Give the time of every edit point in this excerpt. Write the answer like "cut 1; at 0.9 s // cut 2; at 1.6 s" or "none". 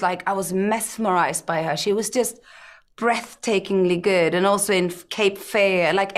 none